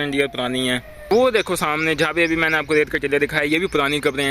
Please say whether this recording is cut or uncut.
cut